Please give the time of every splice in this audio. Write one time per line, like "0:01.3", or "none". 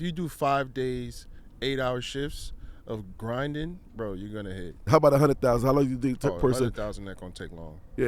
0:04.8